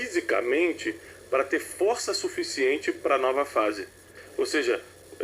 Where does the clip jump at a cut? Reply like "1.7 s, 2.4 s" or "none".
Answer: 4.1 s